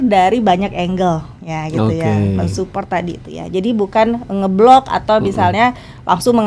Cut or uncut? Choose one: uncut